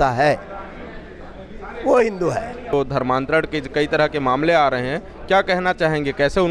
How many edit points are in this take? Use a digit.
1